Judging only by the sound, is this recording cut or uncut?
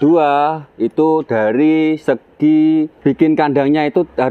cut